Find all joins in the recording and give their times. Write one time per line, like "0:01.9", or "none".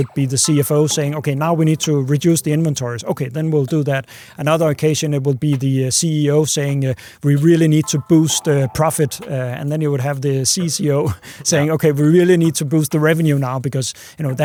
none